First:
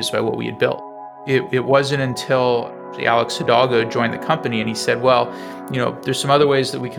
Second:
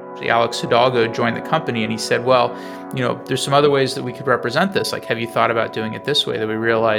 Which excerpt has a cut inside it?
first; 1 cut; at 0.9 s

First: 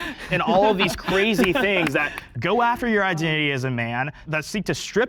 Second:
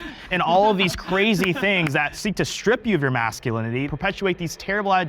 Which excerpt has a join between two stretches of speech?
second; 2 cuts; at 2.1 s, 3.9 s

